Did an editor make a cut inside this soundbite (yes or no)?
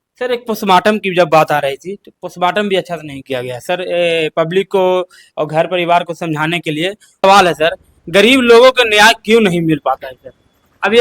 yes